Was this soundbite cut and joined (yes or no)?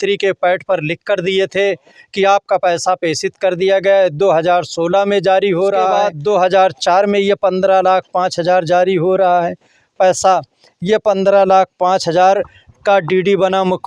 no